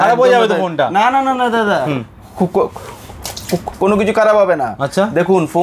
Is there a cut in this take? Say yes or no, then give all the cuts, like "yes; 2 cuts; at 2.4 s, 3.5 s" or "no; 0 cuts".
no; 0 cuts